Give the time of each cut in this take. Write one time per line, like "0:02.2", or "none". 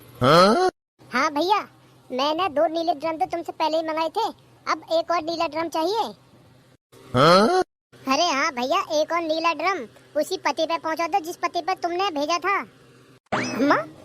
0:00.9